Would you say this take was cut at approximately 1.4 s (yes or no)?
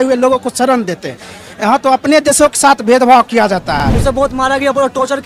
no